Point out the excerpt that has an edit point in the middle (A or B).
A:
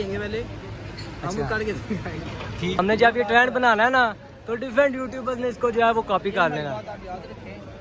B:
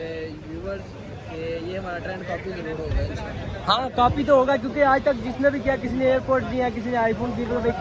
A